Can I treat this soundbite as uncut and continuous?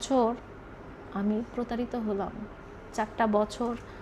yes; 0 cuts

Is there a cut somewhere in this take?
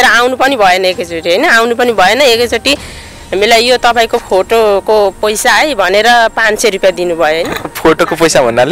no; 0 cuts

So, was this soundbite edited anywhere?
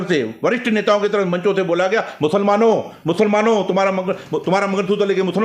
no; 0 cuts

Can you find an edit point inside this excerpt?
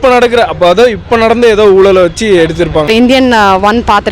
yes; 1 cut; at 2.9 s

